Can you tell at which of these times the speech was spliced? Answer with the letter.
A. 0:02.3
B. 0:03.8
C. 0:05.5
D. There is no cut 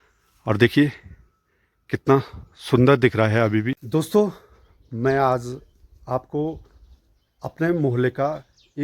B